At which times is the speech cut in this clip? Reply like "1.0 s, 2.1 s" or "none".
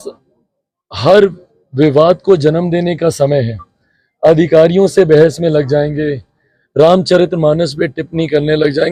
none